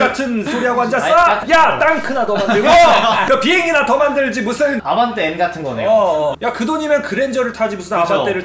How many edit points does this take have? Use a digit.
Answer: 2